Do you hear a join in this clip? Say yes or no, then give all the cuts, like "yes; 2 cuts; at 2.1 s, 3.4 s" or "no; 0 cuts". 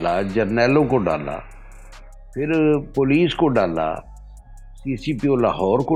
no; 0 cuts